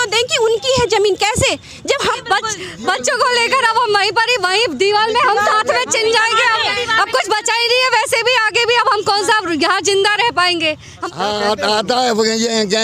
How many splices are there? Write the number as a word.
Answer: two